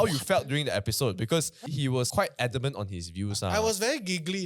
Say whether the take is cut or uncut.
cut